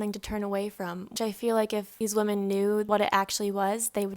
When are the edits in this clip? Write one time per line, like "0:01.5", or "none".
0:02.9